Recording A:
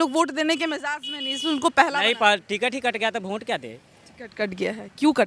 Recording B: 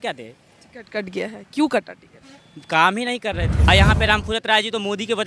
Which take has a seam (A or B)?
B